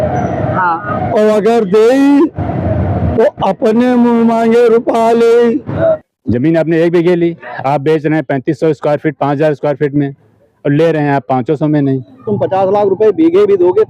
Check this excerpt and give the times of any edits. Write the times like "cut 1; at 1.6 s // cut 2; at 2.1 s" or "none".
cut 1; at 5.7 s // cut 2; at 12.3 s